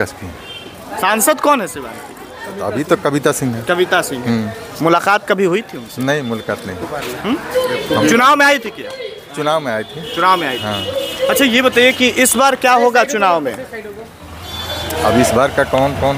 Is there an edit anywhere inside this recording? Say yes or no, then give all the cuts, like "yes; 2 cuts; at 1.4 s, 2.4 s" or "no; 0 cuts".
no; 0 cuts